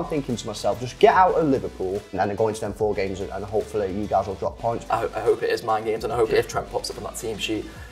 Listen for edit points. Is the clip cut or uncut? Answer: cut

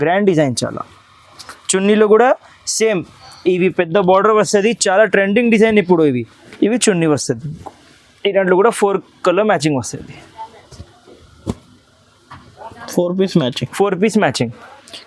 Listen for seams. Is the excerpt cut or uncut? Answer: cut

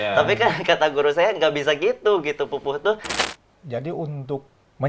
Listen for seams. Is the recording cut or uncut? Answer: cut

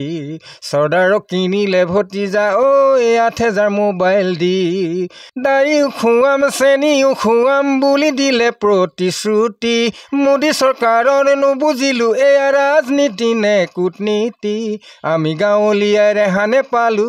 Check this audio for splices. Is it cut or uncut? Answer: uncut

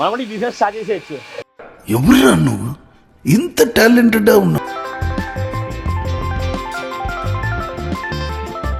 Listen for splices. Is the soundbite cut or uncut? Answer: uncut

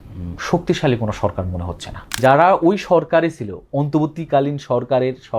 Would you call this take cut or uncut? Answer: cut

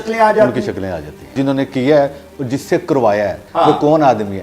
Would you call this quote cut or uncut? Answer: cut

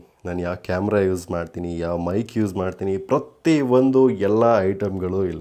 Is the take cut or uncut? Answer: uncut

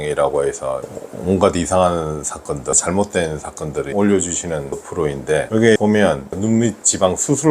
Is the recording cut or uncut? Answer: cut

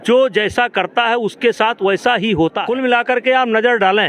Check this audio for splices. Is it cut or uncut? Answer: cut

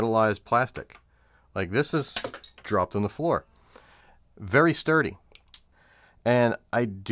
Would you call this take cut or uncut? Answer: cut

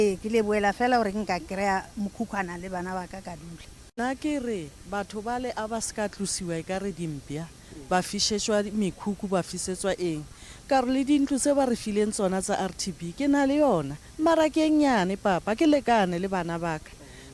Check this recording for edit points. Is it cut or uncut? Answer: cut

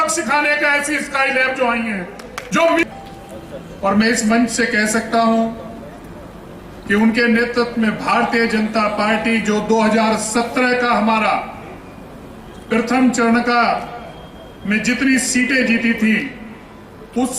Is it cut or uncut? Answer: cut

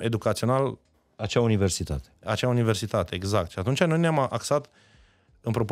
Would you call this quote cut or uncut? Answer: uncut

